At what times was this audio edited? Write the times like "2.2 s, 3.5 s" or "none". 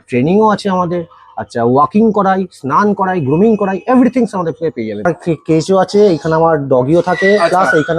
5.0 s

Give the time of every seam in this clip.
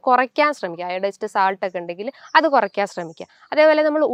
none

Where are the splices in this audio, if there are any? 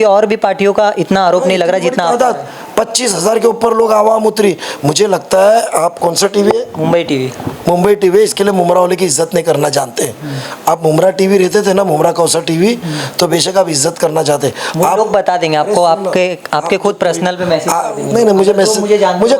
none

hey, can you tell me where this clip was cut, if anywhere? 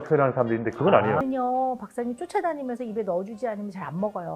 1.2 s

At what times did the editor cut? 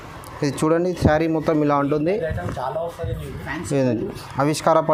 none

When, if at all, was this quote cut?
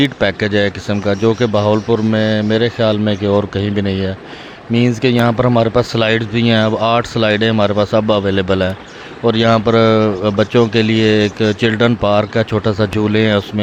none

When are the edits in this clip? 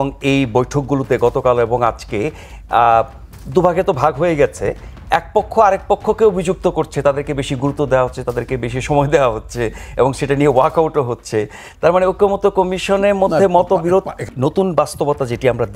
14.3 s

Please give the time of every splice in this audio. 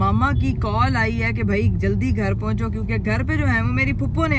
none

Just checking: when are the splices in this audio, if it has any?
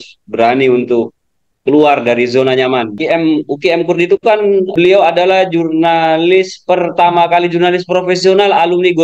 3.0 s, 4.7 s

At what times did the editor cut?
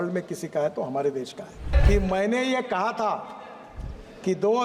1.7 s

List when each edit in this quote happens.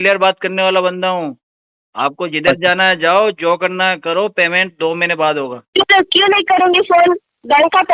5.7 s

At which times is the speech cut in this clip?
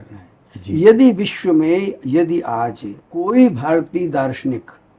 3.3 s

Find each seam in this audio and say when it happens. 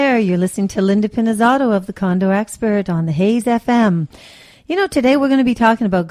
none

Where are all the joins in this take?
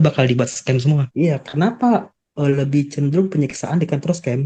1.1 s

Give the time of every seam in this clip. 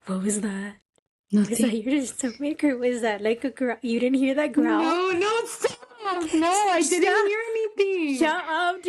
none

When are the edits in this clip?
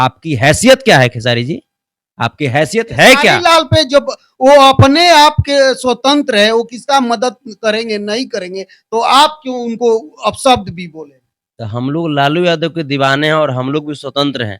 3.4 s

